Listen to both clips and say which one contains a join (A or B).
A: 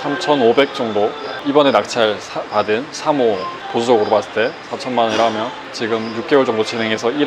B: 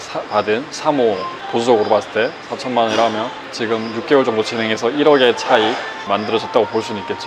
A